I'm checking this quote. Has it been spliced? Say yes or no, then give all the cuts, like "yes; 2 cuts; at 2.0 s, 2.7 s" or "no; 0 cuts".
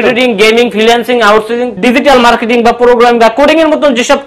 yes; 1 cut; at 1.8 s